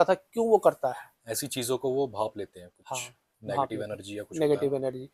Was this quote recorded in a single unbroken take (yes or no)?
yes